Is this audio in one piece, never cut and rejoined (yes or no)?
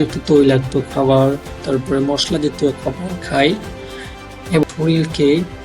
no